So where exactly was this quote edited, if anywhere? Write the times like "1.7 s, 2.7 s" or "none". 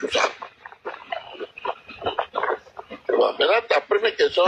none